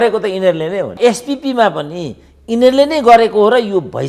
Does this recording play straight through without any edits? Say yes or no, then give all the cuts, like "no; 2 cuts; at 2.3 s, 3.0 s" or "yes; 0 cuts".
no; 1 cut; at 1.0 s